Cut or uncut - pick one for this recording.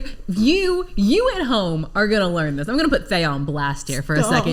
uncut